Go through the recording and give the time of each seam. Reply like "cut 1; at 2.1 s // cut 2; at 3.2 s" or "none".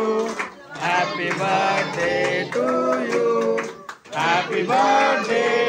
none